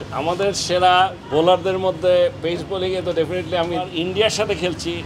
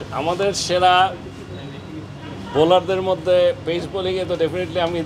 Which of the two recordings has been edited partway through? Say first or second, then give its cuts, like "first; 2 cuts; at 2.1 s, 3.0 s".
first; 2 cuts; at 1.2 s, 3.9 s